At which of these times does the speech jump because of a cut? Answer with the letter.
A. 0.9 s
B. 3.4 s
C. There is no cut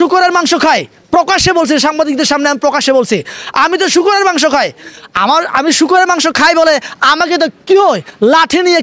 C